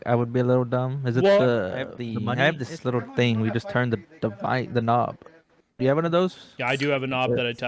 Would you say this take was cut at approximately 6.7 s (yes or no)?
no